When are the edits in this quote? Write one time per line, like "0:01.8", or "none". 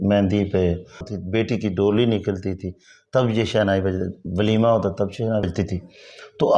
0:01.1
0:05.4

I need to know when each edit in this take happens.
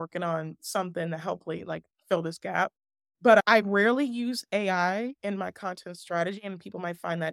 0:03.4

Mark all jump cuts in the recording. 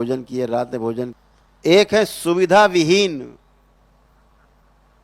0:01.1

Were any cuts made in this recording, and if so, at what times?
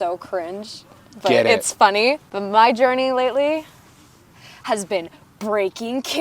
0:02.3

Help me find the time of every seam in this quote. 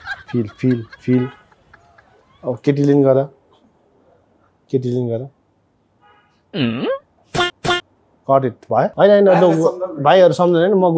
0:08.9

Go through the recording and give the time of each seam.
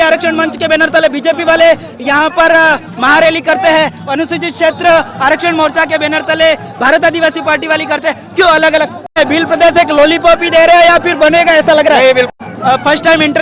0:09.1
0:12.4

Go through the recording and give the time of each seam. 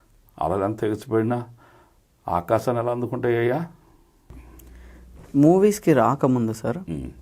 0:04.3

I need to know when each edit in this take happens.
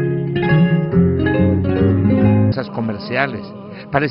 none

